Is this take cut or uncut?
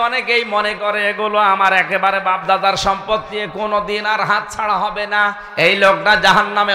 cut